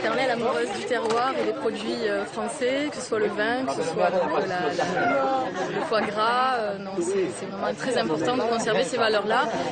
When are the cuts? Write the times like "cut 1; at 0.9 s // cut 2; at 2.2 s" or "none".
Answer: cut 1; at 1.6 s